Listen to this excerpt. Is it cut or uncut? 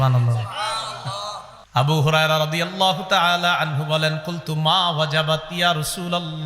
cut